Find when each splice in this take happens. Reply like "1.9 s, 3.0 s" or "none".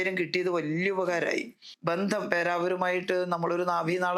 1.6 s